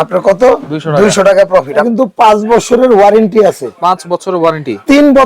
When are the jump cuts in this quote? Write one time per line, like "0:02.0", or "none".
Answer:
0:01.9